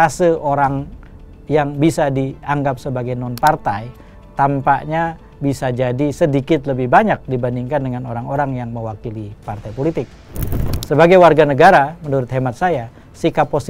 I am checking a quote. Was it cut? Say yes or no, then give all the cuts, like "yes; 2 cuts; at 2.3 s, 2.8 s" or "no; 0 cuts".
yes; 1 cut; at 10.8 s